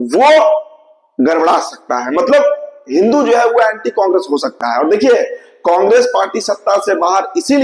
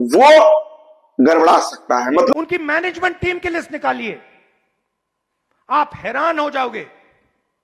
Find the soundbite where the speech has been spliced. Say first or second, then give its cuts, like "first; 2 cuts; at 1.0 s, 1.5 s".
second; 1 cut; at 2.3 s